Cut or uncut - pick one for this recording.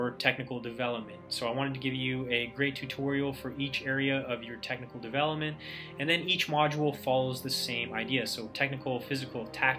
uncut